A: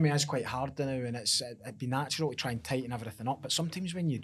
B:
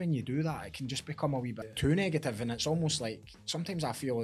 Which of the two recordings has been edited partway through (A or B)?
B